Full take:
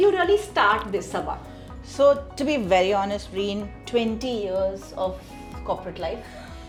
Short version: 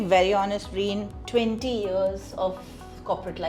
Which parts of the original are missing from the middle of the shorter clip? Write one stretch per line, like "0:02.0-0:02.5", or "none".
none